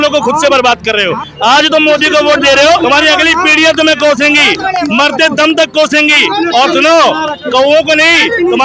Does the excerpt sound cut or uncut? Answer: cut